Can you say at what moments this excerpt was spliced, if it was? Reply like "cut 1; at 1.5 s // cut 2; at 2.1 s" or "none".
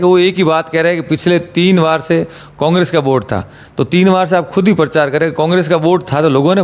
none

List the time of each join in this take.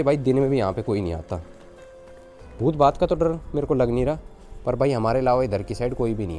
none

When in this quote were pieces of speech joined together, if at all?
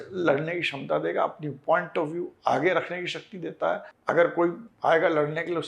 cut 1; at 3.9 s // cut 2; at 4.7 s

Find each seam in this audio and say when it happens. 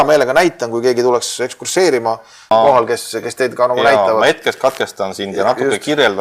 cut 1; at 2.5 s

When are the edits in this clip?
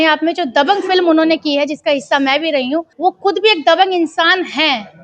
cut 1; at 2.9 s

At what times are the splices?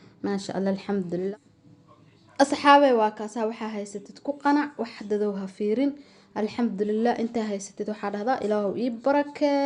cut 1; at 1.7 s

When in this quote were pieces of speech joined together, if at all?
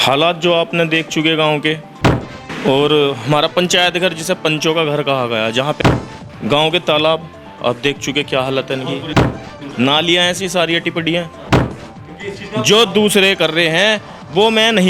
cut 1; at 2.3 s // cut 2; at 5.8 s // cut 3; at 9.4 s // cut 4; at 11.7 s

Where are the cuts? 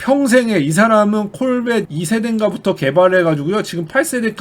cut 1; at 1.9 s

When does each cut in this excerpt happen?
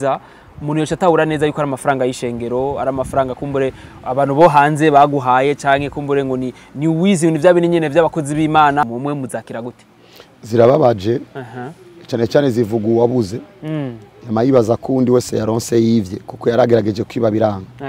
cut 1; at 8.8 s

